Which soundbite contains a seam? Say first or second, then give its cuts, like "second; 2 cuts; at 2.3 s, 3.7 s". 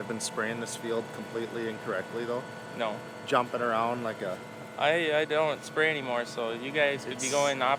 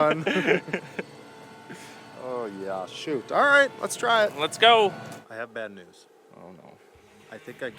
second; 1 cut; at 5.1 s